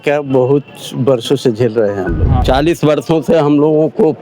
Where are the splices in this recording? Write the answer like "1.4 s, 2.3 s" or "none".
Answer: 2.3 s